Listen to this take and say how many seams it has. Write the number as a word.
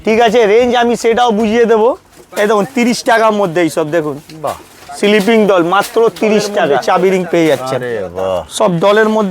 one